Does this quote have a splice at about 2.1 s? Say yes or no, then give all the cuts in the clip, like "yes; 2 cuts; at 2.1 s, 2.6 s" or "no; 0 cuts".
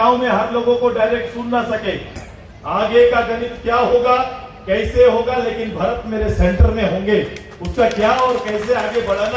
yes; 1 cut; at 2.1 s